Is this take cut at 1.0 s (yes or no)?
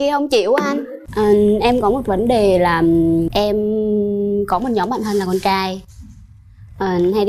yes